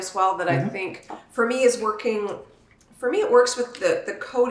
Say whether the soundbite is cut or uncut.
uncut